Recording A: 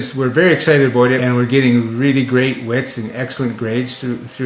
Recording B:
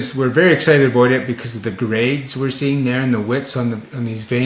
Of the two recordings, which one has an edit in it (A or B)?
A